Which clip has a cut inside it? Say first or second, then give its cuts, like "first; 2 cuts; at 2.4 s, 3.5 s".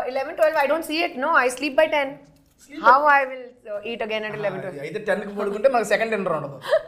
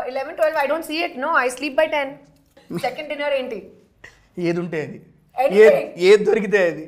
second; 1 cut; at 2.6 s